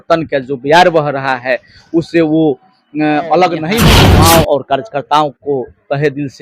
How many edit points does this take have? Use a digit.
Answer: 1